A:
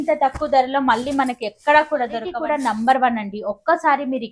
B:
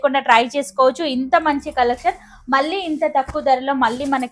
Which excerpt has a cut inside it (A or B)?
A